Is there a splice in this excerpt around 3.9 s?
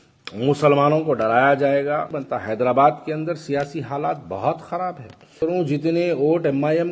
no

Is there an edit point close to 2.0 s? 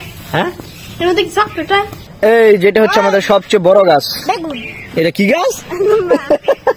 yes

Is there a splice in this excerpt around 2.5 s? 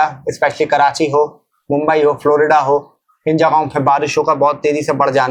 no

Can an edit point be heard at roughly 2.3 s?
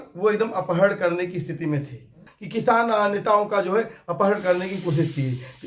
yes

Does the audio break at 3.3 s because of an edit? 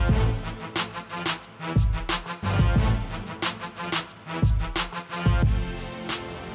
no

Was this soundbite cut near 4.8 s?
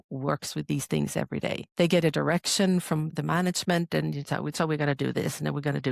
no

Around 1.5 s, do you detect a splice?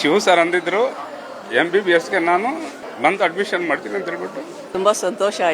no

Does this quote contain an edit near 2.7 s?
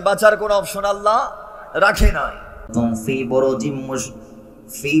yes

